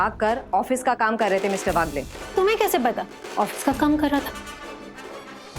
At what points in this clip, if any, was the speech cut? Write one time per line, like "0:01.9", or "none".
0:03.1